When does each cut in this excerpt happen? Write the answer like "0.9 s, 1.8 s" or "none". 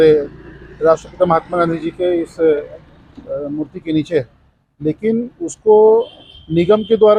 none